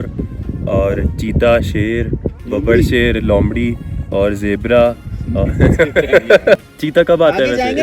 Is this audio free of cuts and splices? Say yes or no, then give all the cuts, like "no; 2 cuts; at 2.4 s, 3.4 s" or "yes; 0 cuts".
no; 1 cut; at 6.6 s